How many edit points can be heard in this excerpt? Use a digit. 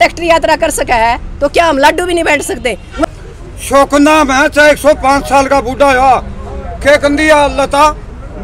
1